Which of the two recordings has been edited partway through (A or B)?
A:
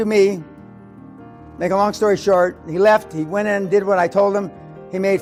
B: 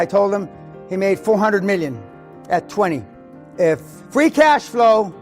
B